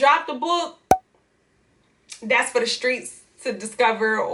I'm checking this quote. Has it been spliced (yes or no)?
no